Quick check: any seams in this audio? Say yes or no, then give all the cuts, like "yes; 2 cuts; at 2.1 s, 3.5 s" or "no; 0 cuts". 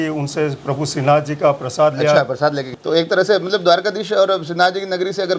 yes; 1 cut; at 2.7 s